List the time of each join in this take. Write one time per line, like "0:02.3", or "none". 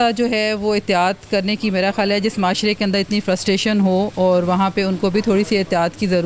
none

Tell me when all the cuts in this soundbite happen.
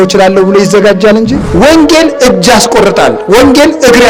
0:01.7

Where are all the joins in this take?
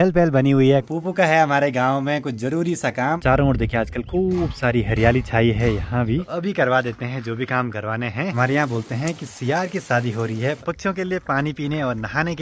0:00.9
0:03.2
0:06.3
0:08.4
0:10.6

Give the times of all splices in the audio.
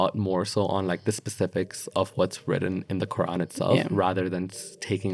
none

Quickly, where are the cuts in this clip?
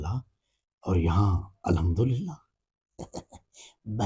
none

